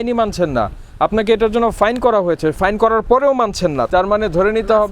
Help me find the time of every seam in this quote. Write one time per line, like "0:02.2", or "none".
0:02.6
0:03.9